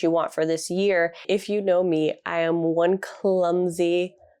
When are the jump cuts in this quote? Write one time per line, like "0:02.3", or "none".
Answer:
0:01.2